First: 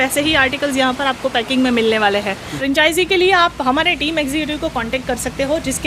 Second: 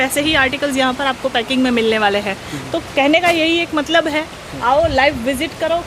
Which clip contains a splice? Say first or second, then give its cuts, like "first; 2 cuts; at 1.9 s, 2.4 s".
first; 1 cut; at 2.5 s